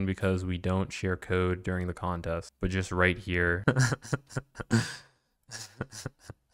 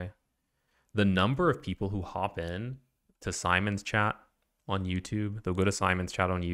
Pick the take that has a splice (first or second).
first